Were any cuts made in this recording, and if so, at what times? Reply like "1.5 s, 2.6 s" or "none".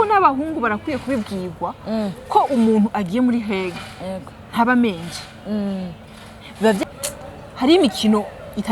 6.9 s